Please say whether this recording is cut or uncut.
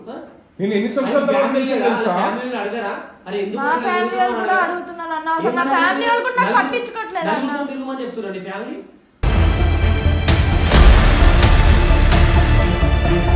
uncut